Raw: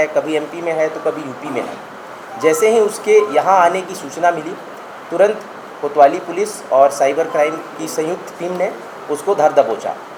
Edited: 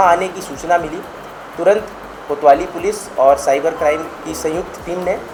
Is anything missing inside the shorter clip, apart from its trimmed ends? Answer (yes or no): no